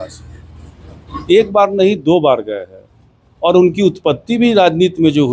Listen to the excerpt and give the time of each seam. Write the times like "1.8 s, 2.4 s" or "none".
none